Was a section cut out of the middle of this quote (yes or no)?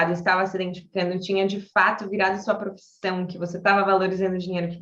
no